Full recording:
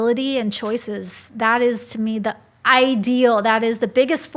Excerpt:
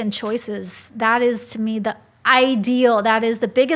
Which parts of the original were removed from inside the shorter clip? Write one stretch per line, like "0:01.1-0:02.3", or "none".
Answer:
none